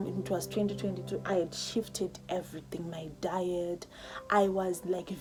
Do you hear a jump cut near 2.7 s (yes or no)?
no